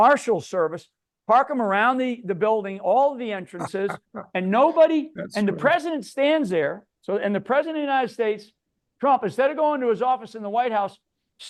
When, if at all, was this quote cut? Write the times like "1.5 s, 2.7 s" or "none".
none